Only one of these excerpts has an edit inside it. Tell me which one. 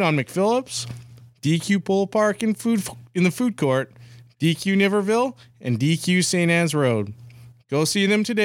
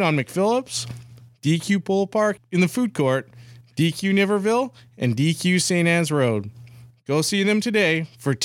second; 1 cut; at 2.4 s

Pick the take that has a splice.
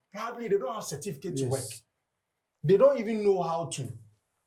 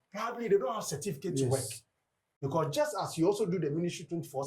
second; 1 cut; at 2.2 s

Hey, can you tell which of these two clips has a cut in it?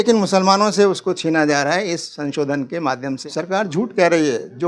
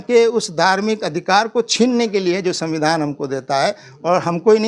first; 1 cut; at 3.2 s

